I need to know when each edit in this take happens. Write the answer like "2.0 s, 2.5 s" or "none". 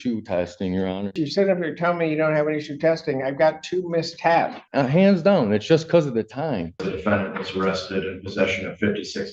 1.2 s, 4.6 s, 6.9 s